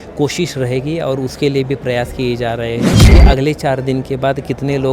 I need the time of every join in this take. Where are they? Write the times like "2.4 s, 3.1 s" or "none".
3.0 s

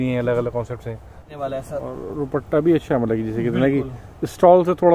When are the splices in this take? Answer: 1.3 s

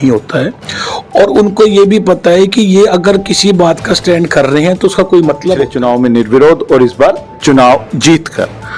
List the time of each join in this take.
5.7 s

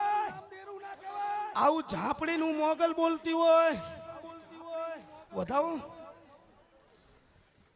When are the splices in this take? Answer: 1.3 s

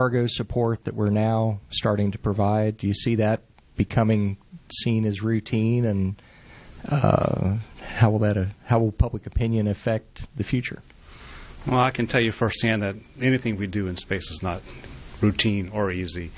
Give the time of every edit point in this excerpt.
7.5 s

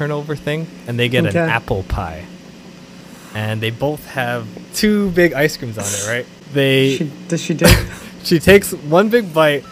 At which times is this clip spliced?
4.6 s, 6.3 s

